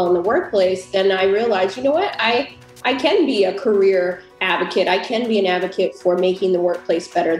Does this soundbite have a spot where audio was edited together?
no; 0 cuts

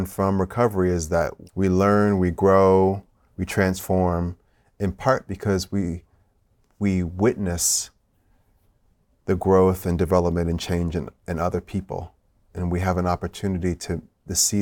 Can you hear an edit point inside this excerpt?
yes; 1 cut; at 1.4 s

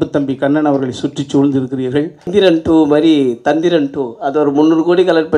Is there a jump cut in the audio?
yes; 1 cut; at 2.3 s

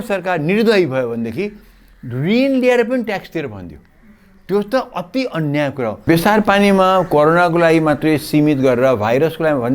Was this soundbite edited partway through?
yes; 1 cut; at 6.1 s

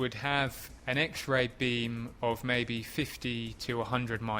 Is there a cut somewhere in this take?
no; 0 cuts

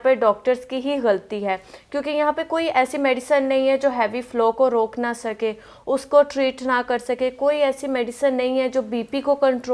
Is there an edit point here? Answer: no; 0 cuts

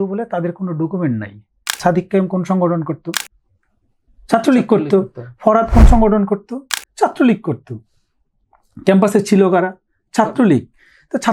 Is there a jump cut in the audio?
yes; 1 cut; at 1.8 s

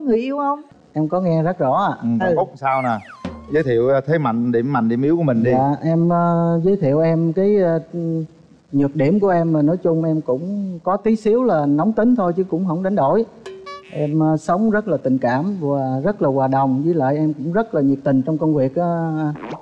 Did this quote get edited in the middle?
no; 0 cuts

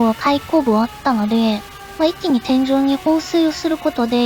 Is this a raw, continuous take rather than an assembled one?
yes; 0 cuts

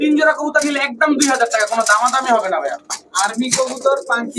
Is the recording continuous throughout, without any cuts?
yes; 0 cuts

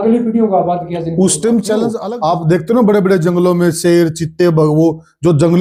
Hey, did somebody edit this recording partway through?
no; 0 cuts

